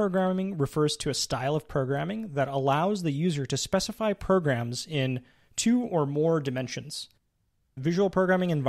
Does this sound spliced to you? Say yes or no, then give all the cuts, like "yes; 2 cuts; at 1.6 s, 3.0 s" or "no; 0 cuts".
no; 0 cuts